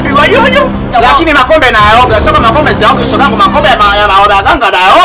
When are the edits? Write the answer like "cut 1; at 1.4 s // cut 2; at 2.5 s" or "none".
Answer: none